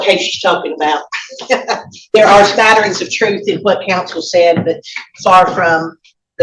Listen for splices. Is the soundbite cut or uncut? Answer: uncut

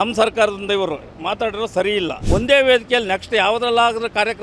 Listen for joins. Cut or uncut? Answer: cut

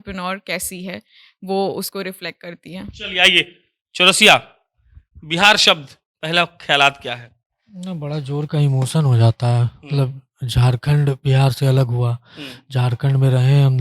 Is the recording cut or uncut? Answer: uncut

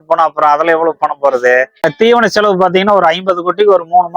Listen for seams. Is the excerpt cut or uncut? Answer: cut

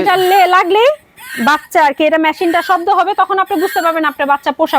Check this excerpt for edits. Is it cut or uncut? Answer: uncut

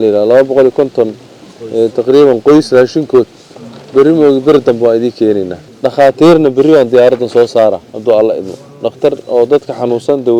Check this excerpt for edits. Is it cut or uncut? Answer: cut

